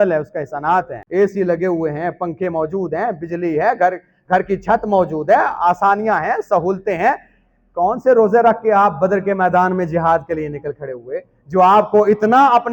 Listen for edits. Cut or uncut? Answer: cut